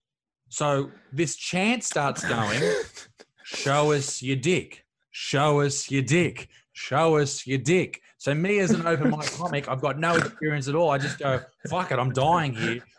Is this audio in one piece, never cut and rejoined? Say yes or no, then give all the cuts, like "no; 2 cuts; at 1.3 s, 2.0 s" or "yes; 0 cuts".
yes; 0 cuts